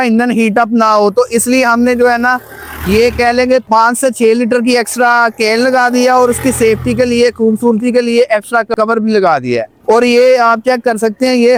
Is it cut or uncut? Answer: uncut